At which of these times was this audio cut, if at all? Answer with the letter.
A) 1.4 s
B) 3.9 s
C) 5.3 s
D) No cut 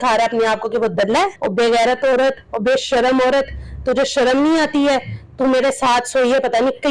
A